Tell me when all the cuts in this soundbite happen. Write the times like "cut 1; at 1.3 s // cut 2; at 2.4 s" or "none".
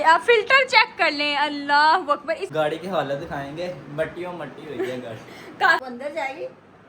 cut 1; at 2.5 s // cut 2; at 5.8 s

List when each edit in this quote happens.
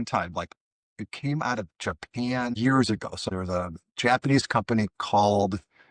cut 1; at 2.6 s // cut 2; at 3.2 s

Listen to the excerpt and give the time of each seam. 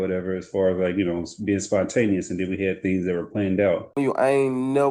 cut 1; at 4.0 s

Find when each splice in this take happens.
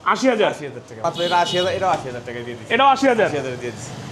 cut 1; at 0.9 s

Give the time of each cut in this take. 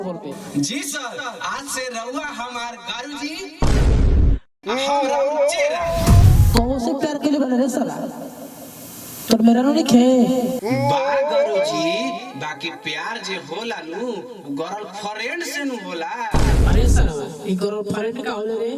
cut 1; at 6.3 s

